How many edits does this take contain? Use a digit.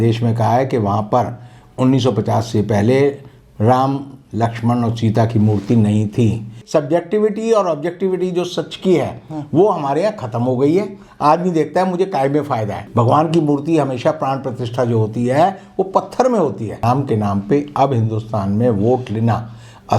3